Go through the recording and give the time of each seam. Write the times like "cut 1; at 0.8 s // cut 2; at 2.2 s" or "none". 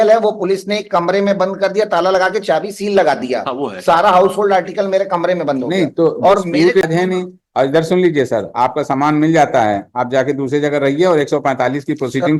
cut 1; at 6.8 s